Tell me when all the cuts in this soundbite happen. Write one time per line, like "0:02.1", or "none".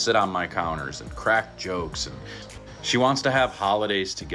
0:02.4